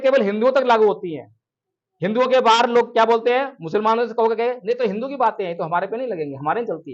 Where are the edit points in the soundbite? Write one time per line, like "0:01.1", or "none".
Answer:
none